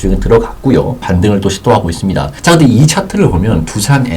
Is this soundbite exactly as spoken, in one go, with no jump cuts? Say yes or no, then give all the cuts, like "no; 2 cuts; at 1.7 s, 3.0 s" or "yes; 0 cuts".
no; 2 cuts; at 1.0 s, 2.3 s